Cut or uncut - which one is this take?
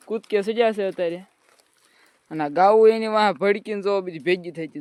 uncut